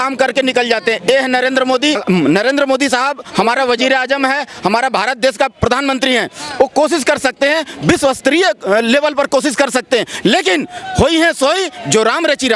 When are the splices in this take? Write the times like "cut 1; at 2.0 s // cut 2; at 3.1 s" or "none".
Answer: cut 1; at 2.0 s